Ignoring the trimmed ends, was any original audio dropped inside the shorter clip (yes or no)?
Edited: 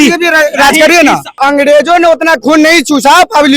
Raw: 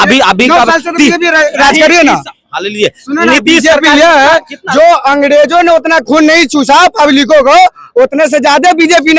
yes